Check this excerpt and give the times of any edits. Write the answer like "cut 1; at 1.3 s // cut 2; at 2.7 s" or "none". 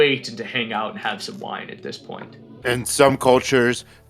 cut 1; at 2.6 s